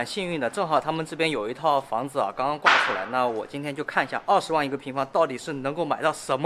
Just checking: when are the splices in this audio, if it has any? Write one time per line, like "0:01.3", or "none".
none